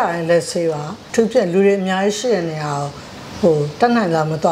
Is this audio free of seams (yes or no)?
no